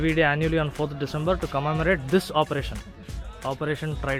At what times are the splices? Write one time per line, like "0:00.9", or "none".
none